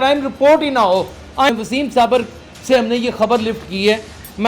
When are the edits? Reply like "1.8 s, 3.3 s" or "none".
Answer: 1.5 s